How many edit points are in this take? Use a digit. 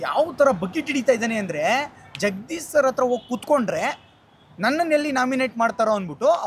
0